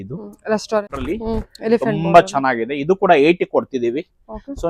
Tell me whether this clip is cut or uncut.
cut